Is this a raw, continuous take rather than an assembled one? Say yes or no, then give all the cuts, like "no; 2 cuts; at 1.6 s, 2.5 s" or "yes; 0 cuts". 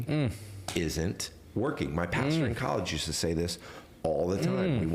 yes; 0 cuts